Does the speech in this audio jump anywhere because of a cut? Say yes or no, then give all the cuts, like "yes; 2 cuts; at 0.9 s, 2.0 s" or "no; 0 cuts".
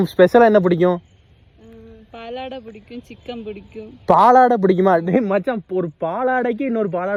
no; 0 cuts